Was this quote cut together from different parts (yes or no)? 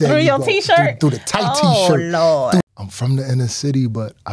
yes